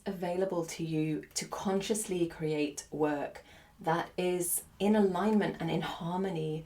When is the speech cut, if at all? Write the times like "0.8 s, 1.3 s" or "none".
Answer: 1.3 s, 4.6 s

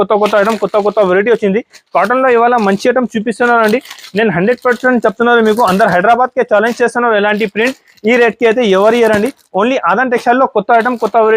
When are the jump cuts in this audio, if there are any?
none

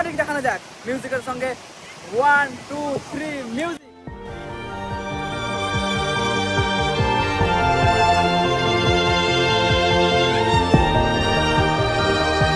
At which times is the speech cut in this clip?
none

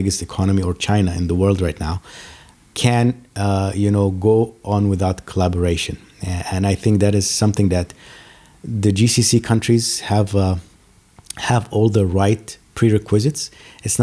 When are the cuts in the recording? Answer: none

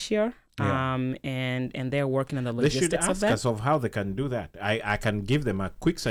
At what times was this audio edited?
none

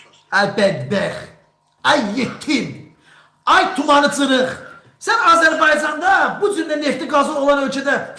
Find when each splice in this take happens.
none

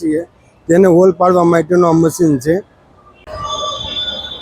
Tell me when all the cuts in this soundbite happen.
3.2 s

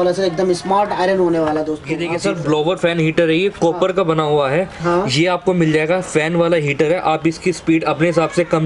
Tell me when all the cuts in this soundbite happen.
1.8 s

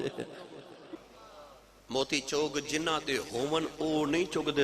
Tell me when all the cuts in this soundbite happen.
0.9 s

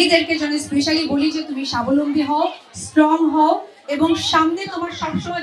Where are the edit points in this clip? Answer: none

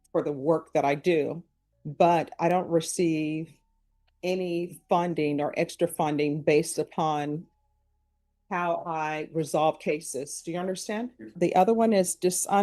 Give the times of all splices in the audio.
11.3 s

